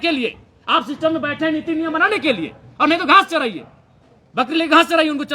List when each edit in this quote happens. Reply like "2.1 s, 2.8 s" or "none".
none